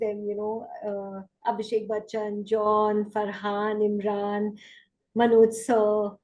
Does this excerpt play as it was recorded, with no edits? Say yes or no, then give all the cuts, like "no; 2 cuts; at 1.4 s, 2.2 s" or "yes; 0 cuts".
yes; 0 cuts